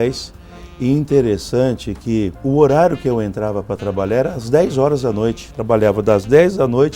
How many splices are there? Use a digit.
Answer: 2